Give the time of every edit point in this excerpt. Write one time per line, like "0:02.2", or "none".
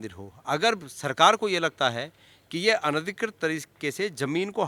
none

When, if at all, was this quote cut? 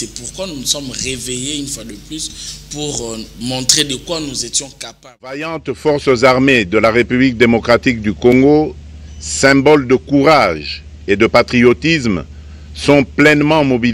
0:05.4

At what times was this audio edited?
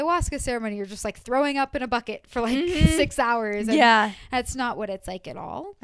none

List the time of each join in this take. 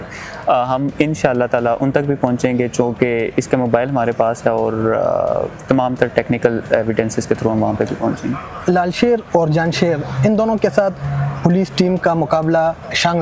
none

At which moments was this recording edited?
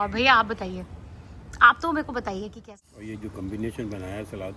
0:02.6

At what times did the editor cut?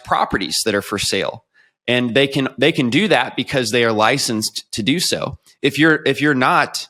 none

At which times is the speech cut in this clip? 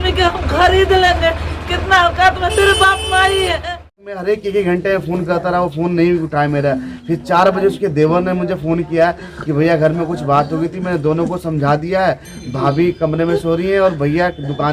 0:04.2

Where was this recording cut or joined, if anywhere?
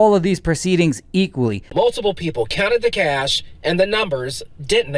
0:01.7

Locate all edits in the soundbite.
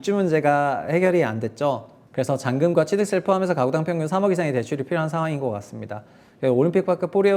none

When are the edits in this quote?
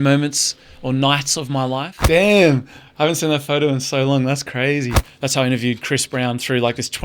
0:01.9
0:05.0

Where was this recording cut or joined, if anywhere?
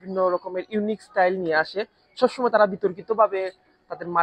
none

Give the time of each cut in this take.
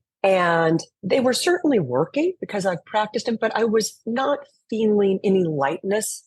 0:00.9

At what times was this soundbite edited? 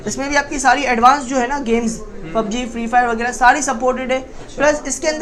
none

